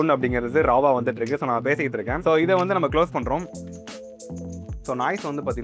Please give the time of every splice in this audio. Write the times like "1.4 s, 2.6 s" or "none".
none

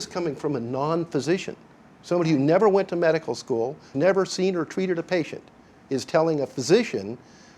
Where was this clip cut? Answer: 3.9 s

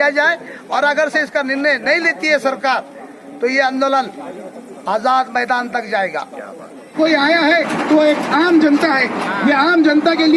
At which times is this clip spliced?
6.9 s

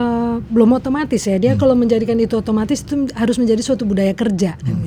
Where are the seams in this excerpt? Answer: none

